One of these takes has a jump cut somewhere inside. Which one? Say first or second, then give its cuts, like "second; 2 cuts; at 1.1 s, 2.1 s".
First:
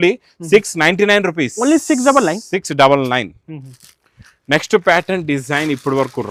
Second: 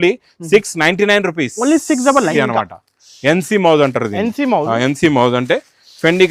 second; 1 cut; at 2.3 s